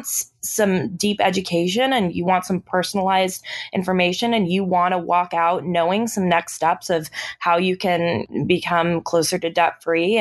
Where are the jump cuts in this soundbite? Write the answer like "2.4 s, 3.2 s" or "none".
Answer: 8.2 s